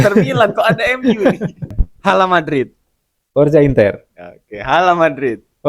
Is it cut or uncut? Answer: cut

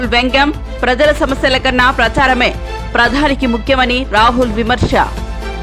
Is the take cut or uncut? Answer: uncut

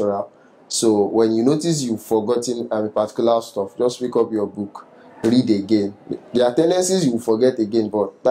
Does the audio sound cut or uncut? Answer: uncut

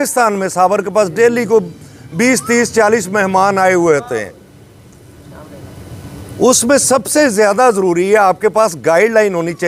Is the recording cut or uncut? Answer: uncut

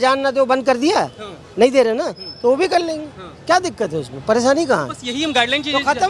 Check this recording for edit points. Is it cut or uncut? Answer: uncut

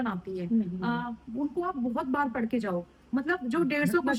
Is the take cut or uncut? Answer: uncut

